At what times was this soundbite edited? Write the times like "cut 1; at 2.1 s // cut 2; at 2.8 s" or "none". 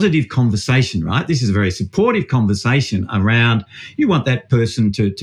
none